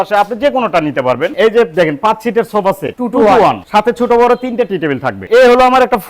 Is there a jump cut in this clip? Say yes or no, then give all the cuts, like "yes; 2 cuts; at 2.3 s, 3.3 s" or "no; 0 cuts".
yes; 4 cuts; at 1.3 s, 2.9 s, 3.6 s, 5.2 s